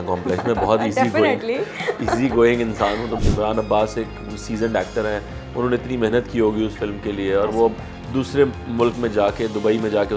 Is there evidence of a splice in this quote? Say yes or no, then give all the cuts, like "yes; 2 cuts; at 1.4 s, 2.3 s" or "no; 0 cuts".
yes; 1 cut; at 3.2 s